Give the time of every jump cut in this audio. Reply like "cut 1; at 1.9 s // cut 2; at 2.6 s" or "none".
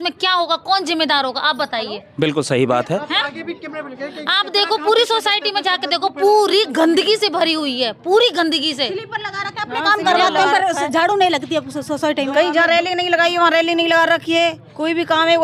none

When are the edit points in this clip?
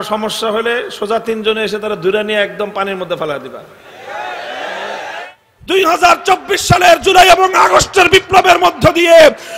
cut 1; at 5.3 s

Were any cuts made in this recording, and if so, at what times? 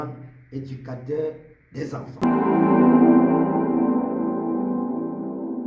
none

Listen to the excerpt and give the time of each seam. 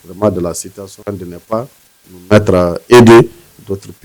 cut 1; at 0.9 s

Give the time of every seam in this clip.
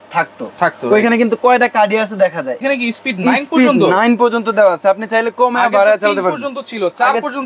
cut 1; at 2.6 s

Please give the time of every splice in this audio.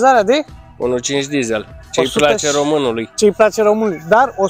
none

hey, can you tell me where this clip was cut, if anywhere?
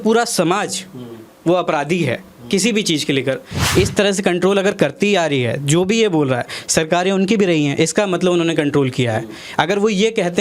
cut 1; at 3.6 s

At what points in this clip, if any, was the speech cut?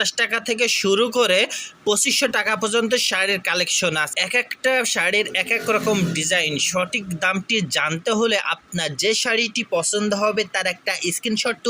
cut 1; at 4.1 s

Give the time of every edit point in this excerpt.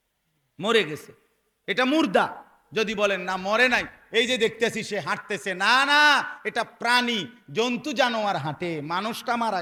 none

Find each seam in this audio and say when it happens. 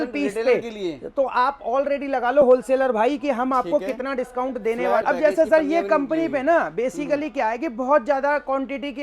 cut 1; at 5.0 s

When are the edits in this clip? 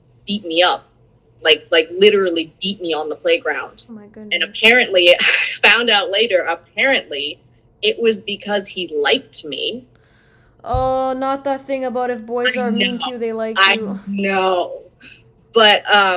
none

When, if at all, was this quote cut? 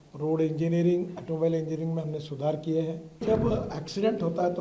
cut 1; at 3.2 s

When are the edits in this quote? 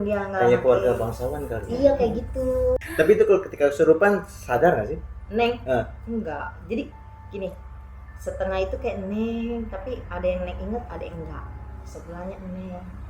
cut 1; at 2.9 s

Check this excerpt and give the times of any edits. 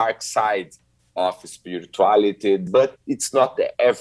cut 1; at 2.6 s

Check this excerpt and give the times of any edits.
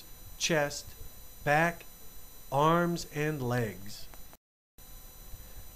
cut 1; at 4.4 s

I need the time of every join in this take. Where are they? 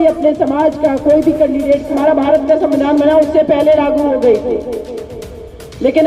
cut 1; at 1.9 s

